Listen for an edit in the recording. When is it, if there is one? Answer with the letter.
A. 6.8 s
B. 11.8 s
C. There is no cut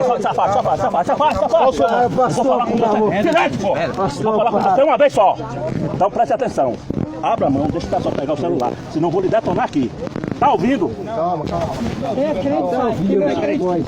B